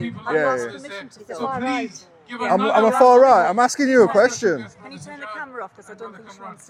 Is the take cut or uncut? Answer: uncut